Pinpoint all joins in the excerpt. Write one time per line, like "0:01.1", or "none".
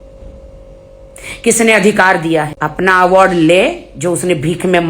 0:02.5